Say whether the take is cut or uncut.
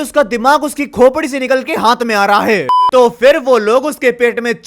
cut